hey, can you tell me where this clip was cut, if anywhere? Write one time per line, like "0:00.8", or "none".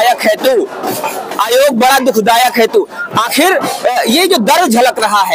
none